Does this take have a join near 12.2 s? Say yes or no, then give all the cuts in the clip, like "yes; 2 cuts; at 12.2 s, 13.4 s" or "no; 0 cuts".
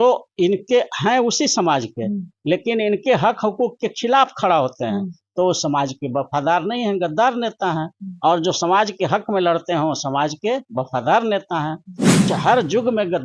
yes; 1 cut; at 12.2 s